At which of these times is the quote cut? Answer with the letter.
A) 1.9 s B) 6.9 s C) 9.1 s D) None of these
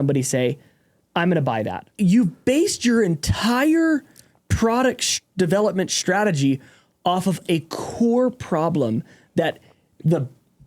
A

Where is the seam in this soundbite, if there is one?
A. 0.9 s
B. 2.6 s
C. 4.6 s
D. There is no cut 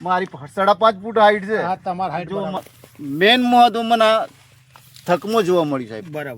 B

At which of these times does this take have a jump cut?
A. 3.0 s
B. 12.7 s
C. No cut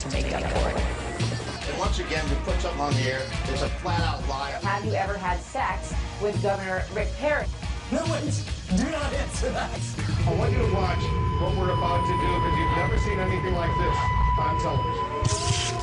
B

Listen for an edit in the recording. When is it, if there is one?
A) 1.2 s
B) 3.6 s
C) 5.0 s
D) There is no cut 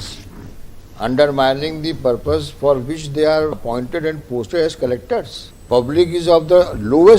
B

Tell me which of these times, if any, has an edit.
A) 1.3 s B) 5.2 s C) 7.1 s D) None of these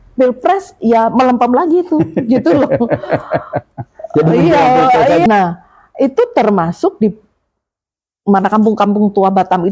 B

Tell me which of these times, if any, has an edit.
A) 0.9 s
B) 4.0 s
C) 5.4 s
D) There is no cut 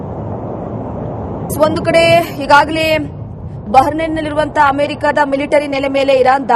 A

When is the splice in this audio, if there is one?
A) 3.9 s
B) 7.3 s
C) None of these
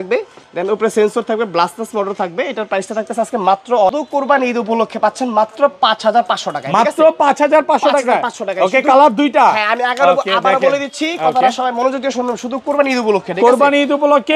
A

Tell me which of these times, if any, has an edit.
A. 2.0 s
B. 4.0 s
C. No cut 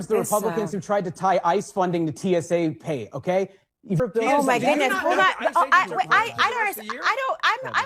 B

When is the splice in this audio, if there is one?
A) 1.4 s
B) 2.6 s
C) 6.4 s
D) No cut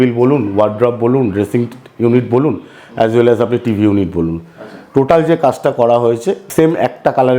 C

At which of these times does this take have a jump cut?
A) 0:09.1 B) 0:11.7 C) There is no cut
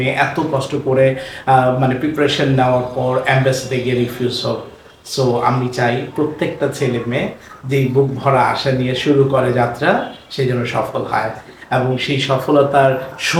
C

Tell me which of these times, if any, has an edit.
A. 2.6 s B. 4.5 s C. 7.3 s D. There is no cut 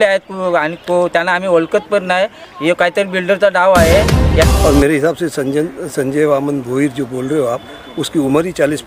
B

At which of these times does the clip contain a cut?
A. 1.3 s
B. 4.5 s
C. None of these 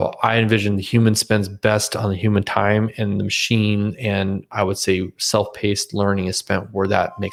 C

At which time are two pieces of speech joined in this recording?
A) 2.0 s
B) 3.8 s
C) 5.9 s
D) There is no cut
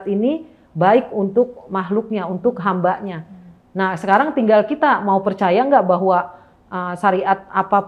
D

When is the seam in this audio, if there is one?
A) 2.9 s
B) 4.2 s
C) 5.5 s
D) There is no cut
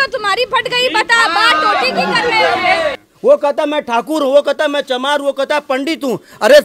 A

